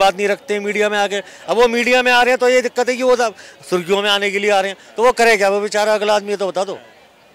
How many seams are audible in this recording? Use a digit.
0